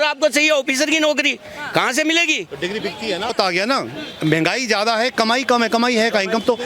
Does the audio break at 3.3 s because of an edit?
yes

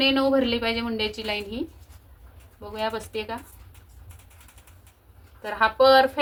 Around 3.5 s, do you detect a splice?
no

